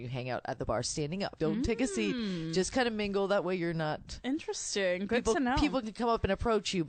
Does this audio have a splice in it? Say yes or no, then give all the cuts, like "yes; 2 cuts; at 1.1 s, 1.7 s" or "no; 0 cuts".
yes; 2 cuts; at 1.4 s, 4.1 s